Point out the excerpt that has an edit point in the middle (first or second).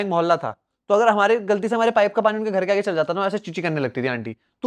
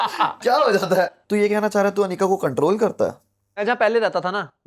second